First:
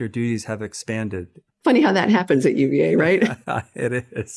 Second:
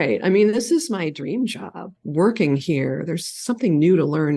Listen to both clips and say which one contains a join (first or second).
second